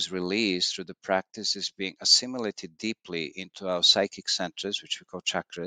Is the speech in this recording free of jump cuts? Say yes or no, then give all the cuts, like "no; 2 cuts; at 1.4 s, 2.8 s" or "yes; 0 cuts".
yes; 0 cuts